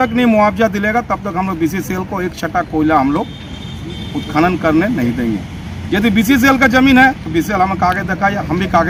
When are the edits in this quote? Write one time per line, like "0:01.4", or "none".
none